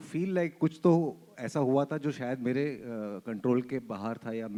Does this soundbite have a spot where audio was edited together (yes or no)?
no